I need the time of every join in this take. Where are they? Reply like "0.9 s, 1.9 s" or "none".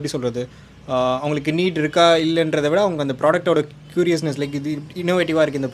none